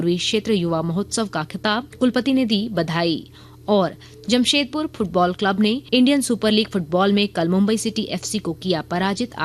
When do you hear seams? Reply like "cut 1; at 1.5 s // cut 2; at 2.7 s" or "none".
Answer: cut 1; at 1.9 s // cut 2; at 5.8 s

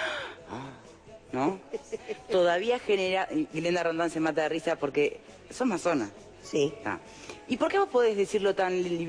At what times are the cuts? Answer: none

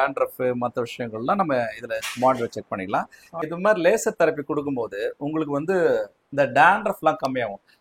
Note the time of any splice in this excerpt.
cut 1; at 3.4 s

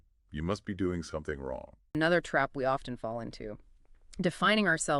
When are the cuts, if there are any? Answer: cut 1; at 1.9 s

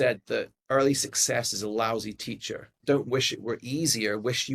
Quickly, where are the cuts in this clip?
cut 1; at 2.7 s

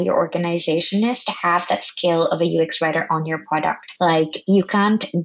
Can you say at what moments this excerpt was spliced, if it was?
cut 1; at 3.9 s

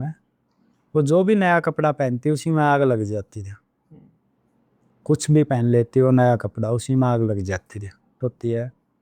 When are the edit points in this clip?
cut 1; at 8.1 s

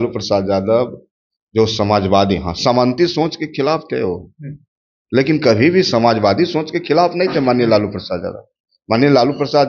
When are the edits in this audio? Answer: none

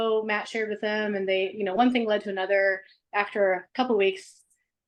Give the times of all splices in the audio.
none

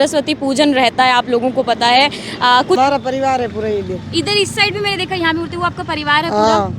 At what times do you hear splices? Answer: cut 1; at 2.8 s

